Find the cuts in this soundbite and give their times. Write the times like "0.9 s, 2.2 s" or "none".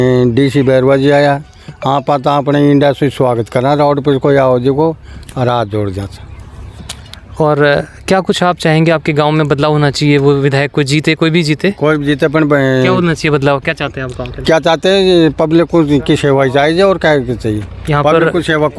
none

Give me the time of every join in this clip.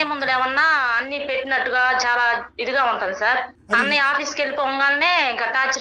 3.8 s

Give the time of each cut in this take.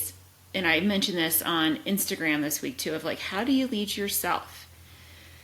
none

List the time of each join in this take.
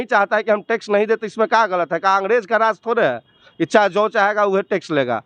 none

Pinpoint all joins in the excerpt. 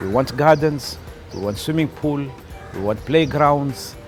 none

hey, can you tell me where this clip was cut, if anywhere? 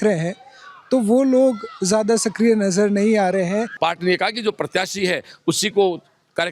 3.7 s

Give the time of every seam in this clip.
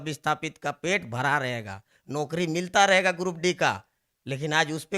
none

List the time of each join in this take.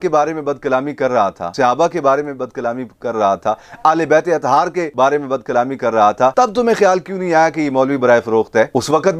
1.4 s, 4.9 s

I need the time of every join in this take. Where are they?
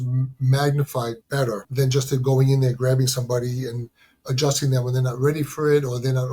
1.6 s

